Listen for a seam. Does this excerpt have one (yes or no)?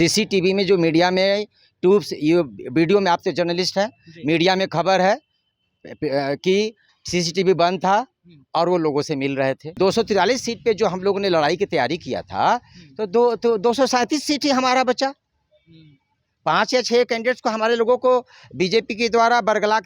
yes